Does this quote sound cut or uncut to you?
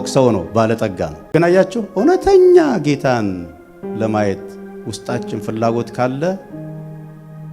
cut